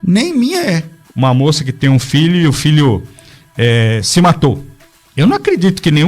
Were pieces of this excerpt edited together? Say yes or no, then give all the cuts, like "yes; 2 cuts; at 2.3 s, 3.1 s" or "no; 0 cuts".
yes; 1 cut; at 1.0 s